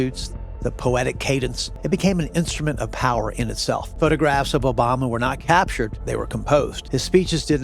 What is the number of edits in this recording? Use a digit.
4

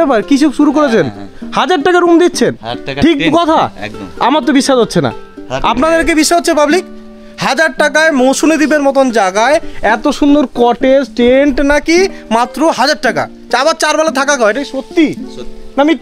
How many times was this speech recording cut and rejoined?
0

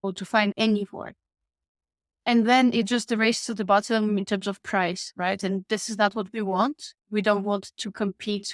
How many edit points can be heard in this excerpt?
0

